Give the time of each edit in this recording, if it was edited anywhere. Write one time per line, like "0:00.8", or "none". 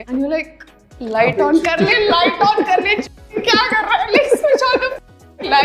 none